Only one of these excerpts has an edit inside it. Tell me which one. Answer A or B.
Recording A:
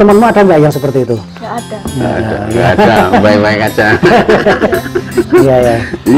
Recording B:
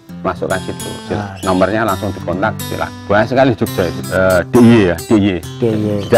B